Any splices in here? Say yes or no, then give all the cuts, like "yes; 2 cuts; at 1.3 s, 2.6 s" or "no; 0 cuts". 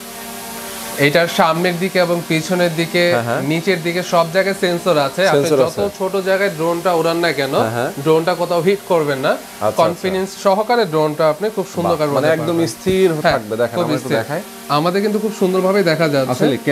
no; 0 cuts